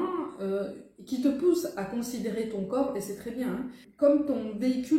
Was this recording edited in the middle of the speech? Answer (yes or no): yes